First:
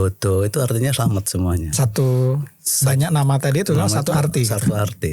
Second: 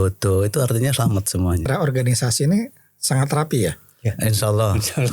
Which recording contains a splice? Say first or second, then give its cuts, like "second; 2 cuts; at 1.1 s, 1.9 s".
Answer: second; 1 cut; at 1.7 s